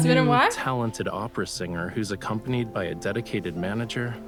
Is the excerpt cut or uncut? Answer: uncut